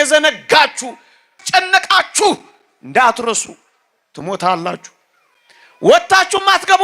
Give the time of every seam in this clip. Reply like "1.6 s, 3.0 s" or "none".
1.4 s